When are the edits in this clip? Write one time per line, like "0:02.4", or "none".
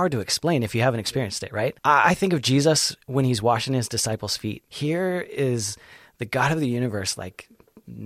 0:01.8
0:04.7